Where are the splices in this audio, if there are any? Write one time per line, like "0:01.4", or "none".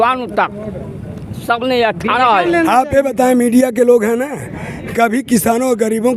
0:02.5